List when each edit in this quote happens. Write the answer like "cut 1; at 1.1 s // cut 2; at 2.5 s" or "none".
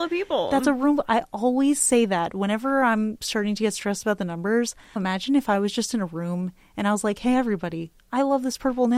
cut 1; at 5.0 s